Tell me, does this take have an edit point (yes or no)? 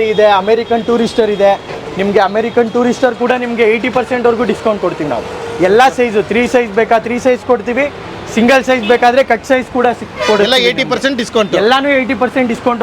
no